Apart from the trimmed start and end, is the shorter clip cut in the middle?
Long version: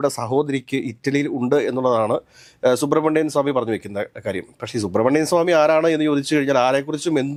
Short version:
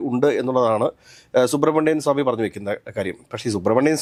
no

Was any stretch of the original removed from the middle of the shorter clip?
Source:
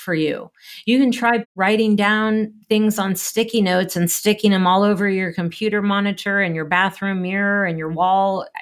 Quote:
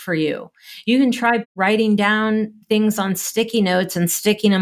no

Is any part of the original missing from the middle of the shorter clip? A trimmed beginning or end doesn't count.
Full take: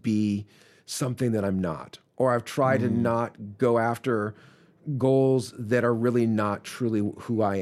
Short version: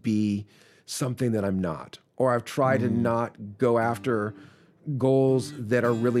no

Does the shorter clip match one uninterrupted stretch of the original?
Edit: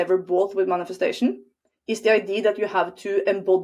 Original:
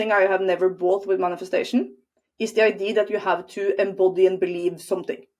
yes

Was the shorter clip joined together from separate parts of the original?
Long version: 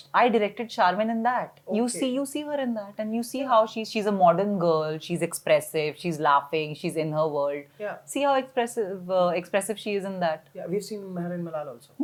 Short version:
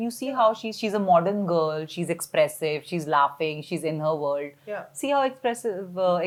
no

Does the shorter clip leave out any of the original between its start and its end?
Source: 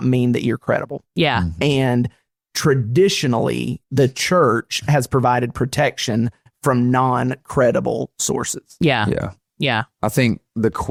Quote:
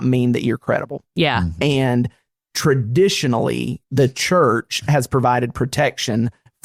no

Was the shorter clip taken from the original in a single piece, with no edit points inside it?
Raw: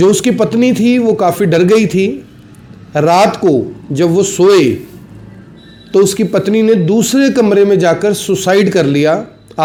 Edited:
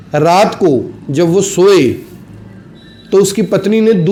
yes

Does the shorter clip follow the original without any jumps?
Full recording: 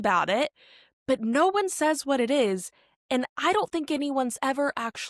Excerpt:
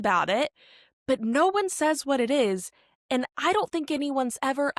yes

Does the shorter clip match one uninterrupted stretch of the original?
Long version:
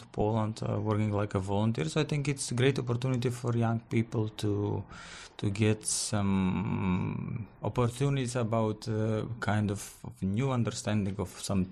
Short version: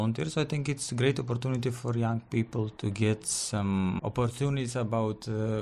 no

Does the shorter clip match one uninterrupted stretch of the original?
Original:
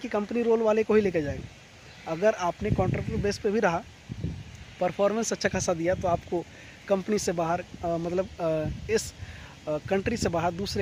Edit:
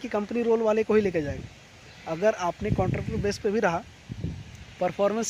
yes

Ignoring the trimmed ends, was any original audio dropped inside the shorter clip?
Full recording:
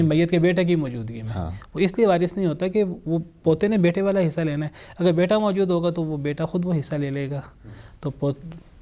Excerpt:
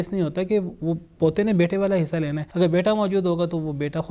yes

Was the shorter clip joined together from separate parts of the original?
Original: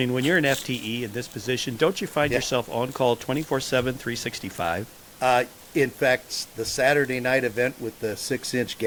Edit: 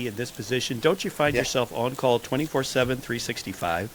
no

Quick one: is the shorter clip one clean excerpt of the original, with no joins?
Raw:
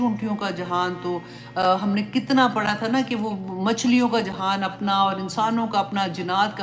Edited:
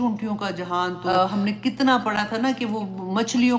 no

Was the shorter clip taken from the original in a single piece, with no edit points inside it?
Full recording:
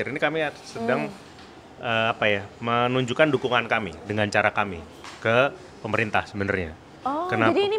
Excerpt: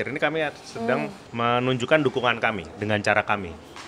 no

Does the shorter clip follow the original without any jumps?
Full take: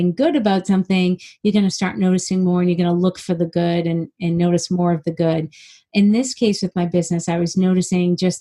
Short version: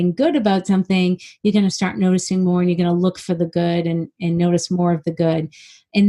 yes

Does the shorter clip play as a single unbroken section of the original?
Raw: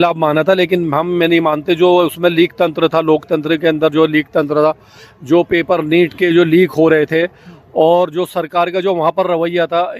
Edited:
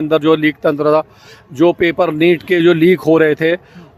yes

